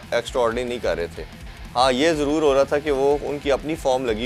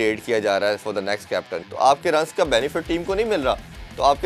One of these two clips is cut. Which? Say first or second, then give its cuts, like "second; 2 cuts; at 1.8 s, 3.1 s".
second; 1 cut; at 1.6 s